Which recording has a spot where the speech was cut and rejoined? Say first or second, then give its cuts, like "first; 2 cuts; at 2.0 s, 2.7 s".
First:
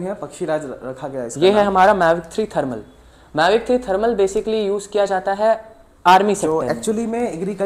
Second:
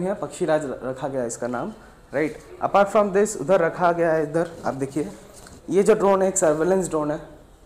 first; 2 cuts; at 1.3 s, 6.4 s